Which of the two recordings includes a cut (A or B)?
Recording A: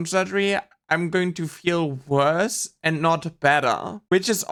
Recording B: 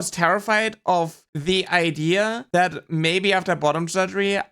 B